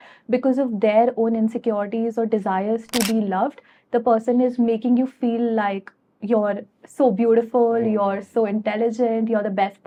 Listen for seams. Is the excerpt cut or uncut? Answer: uncut